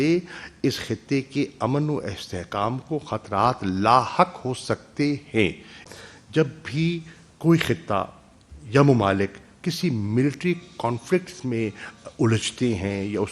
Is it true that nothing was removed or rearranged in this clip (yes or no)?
no